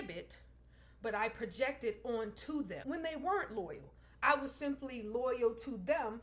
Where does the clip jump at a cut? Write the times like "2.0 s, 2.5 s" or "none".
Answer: 2.8 s